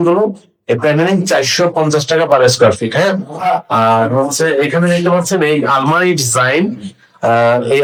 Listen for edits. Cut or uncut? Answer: uncut